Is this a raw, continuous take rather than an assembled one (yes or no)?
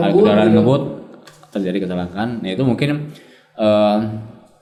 yes